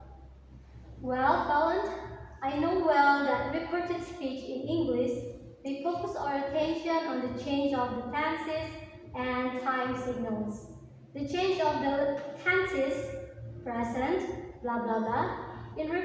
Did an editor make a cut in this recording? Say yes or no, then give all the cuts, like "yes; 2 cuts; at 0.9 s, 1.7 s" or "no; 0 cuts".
no; 0 cuts